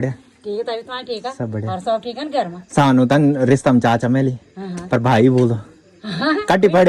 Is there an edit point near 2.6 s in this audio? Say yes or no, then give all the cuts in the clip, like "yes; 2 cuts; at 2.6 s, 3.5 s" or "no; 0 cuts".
no; 0 cuts